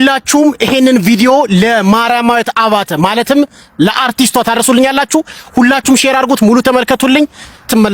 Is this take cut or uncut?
uncut